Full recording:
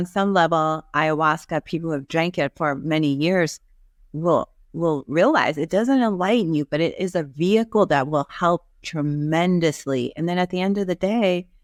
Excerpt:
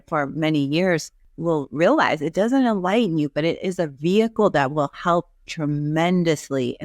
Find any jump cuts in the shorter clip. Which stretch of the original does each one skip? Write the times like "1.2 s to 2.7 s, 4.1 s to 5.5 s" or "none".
3.7 s to 4.6 s